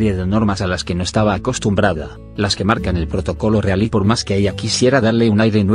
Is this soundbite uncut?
no; 1 cut; at 3.7 s

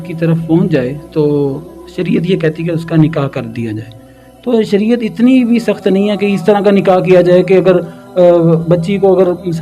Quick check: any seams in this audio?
no; 0 cuts

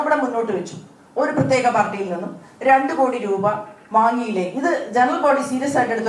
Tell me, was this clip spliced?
no; 0 cuts

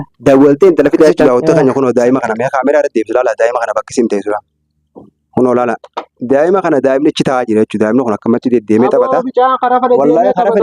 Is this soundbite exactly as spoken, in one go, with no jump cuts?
no; 1 cut; at 1.2 s

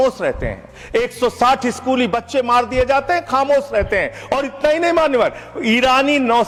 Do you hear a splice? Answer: no; 0 cuts

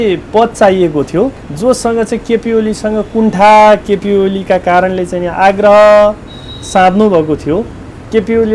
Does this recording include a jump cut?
yes; 1 cut; at 1.4 s

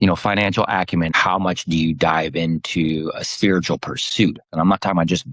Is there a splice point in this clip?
yes; 1 cut; at 1.1 s

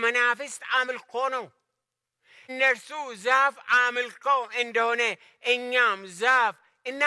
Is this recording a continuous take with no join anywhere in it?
yes; 0 cuts

